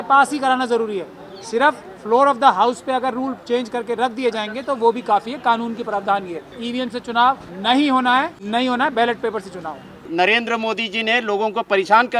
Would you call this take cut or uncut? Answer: cut